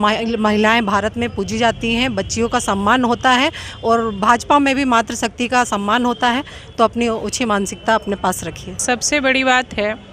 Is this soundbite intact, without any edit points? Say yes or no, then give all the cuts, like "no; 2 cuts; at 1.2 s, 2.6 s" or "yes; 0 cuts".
no; 1 cut; at 8.8 s